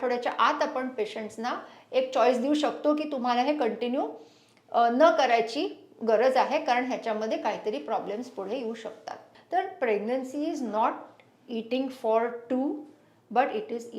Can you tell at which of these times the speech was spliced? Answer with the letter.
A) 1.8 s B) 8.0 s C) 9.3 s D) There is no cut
C